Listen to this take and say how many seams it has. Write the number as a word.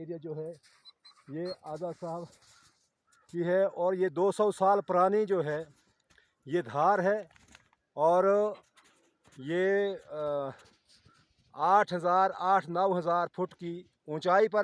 zero